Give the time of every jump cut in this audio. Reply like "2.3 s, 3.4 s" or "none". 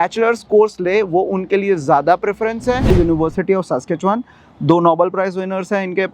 2.9 s